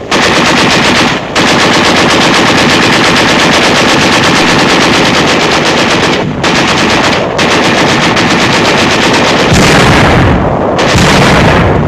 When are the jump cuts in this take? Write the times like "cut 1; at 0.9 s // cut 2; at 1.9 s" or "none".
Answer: cut 1; at 5.5 s